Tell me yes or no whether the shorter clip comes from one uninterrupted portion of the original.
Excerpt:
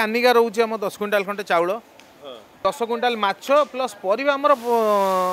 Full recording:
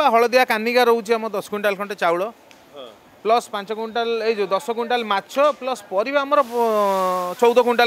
no